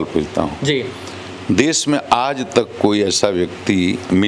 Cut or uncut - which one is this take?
uncut